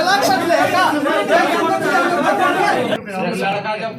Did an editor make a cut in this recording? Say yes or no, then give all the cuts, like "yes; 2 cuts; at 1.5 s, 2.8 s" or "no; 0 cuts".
yes; 1 cut; at 3.0 s